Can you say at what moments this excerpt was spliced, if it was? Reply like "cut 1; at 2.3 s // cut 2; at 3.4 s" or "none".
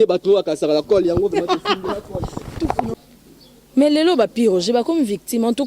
cut 1; at 2.9 s